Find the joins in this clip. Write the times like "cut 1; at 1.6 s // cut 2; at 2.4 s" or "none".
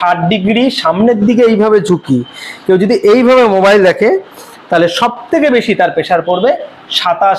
none